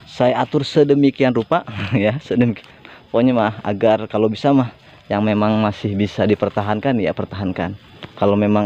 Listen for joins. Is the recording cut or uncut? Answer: uncut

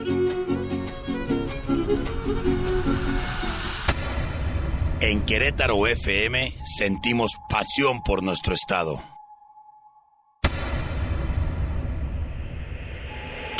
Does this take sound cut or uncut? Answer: uncut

